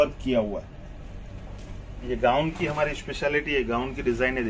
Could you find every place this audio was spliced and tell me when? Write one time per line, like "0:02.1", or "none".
0:02.0